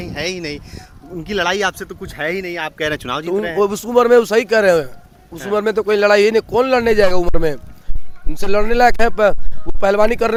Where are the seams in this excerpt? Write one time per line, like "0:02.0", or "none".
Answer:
none